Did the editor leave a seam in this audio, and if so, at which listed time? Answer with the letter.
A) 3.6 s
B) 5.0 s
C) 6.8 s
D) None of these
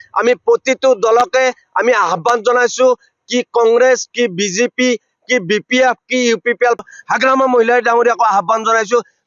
C